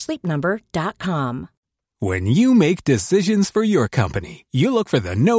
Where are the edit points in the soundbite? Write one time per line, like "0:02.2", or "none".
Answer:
0:01.6